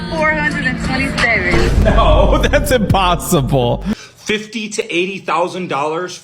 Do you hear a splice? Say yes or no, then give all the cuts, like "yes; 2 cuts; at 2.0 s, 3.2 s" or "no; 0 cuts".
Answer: yes; 1 cut; at 3.9 s